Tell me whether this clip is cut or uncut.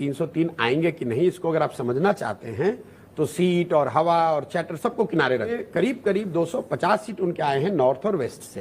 cut